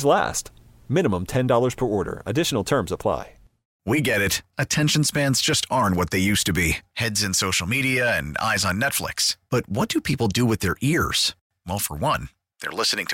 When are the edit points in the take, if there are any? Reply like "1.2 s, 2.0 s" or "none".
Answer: 3.8 s